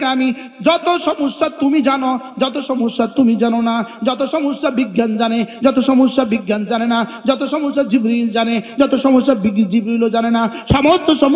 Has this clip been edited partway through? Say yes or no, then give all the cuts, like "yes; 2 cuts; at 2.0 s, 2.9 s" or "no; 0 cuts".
no; 0 cuts